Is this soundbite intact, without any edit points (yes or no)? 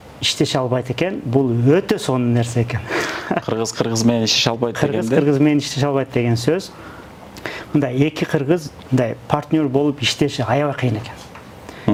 yes